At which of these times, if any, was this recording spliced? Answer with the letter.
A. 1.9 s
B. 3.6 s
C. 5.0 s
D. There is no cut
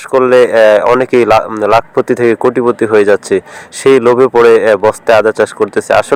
D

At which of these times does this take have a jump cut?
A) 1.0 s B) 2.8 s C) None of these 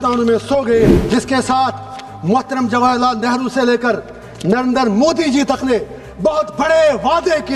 A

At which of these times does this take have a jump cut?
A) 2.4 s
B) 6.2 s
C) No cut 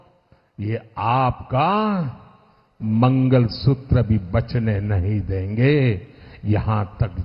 C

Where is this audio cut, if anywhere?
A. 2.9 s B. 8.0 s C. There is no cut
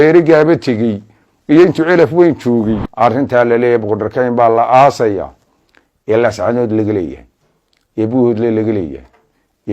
A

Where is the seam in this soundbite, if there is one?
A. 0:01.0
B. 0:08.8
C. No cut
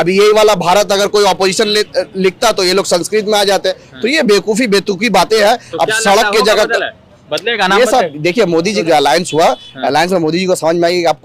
B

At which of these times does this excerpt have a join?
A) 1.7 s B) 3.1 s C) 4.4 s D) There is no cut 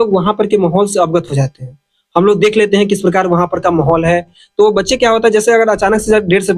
D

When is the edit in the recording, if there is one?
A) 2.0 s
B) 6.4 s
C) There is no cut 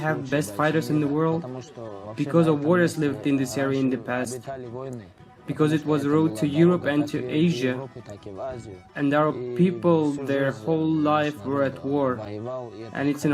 A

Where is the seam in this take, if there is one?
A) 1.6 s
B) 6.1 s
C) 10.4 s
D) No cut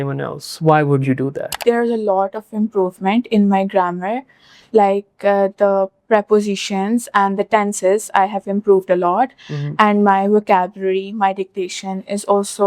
A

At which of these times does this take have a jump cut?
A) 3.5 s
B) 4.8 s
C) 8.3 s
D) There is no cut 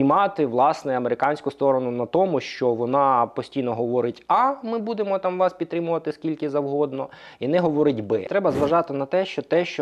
C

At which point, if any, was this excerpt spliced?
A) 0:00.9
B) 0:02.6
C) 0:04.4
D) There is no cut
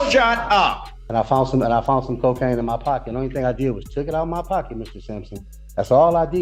A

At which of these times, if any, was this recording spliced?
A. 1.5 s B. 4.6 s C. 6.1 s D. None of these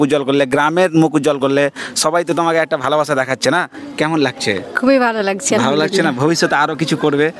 D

